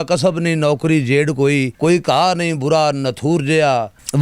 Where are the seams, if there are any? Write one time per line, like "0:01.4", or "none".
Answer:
0:01.7